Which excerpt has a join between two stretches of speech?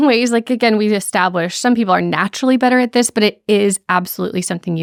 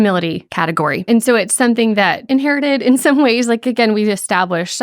second; 1 cut; at 2.2 s

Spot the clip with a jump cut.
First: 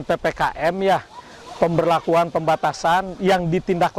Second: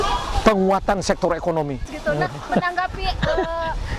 second; 1 cut; at 1.9 s

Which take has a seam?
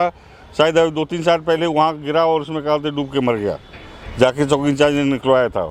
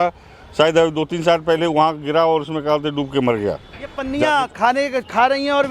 second; 1 cut; at 4.0 s

